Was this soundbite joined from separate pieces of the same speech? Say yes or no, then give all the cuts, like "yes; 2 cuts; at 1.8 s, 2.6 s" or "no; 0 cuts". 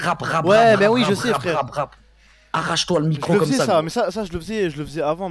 no; 0 cuts